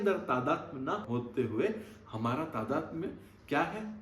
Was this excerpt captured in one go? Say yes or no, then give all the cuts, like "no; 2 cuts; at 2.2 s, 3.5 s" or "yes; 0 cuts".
no; 1 cut; at 1.0 s